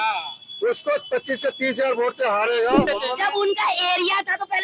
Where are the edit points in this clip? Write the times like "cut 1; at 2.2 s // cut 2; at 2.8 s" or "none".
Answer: cut 1; at 2.9 s